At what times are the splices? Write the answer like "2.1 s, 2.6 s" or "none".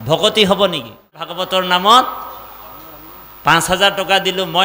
1.2 s